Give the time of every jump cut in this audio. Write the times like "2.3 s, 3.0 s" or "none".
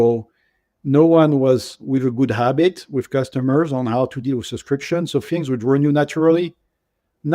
1.8 s